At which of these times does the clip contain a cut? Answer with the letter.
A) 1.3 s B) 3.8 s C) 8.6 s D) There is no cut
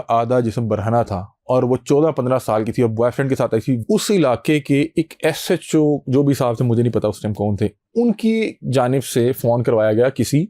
B